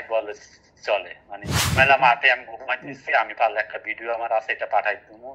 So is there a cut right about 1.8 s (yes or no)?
yes